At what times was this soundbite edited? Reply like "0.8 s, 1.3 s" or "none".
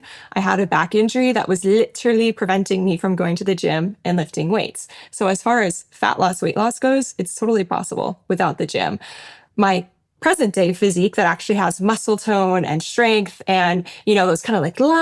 none